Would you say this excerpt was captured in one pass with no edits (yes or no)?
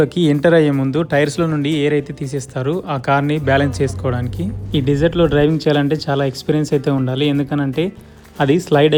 yes